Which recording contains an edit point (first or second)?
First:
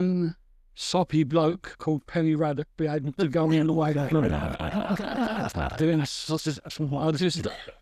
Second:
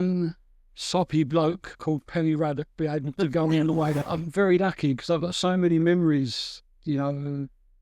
second